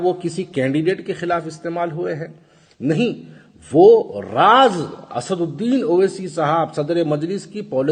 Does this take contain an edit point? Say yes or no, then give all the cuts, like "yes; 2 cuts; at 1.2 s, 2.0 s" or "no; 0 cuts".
no; 0 cuts